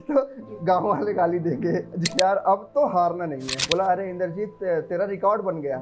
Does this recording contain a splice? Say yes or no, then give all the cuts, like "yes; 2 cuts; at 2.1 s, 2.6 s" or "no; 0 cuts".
yes; 2 cuts; at 2.1 s, 3.5 s